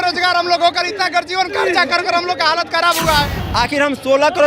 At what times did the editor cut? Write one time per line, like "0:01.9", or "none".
0:03.4